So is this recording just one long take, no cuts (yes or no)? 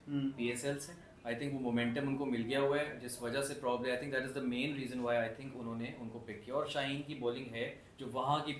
yes